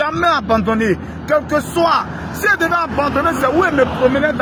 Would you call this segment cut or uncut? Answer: uncut